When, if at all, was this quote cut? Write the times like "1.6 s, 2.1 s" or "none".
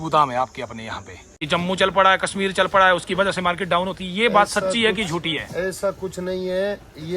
1.4 s